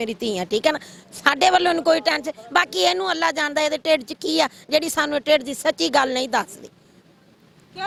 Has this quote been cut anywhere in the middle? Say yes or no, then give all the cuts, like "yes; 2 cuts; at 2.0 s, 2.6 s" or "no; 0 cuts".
no; 0 cuts